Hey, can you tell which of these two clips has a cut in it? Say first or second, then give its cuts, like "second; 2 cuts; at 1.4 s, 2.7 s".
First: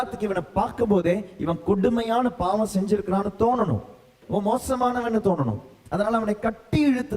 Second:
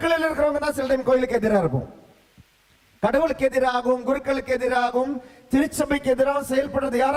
first; 1 cut; at 4.2 s